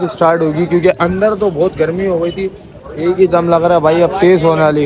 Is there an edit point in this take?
yes; 1 cut; at 2.5 s

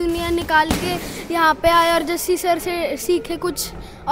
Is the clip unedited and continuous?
yes; 0 cuts

